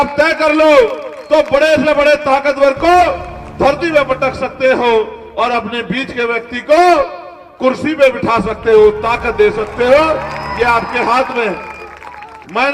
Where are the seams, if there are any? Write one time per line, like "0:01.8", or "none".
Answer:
none